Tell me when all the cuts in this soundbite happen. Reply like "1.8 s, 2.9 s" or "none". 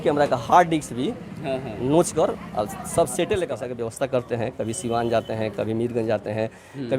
3.7 s